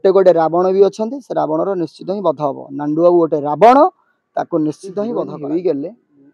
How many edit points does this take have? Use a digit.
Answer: 1